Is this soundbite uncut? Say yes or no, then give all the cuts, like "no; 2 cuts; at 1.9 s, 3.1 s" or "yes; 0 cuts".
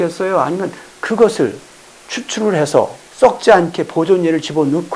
yes; 0 cuts